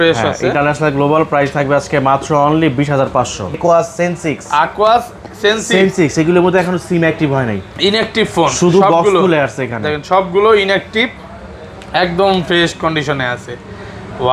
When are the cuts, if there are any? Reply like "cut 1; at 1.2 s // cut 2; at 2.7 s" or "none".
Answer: cut 1; at 3.6 s